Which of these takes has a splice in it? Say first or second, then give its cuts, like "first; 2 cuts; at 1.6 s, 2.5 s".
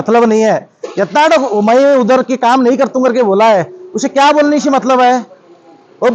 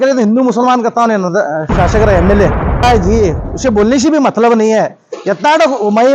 second; 1 cut; at 2.8 s